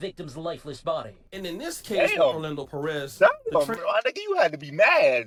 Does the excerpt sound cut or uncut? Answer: uncut